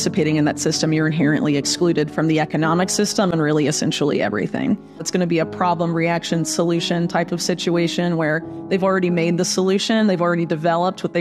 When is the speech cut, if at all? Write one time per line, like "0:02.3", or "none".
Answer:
0:05.1